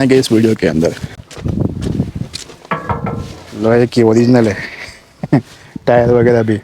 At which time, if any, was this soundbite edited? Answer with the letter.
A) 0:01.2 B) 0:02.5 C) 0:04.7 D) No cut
A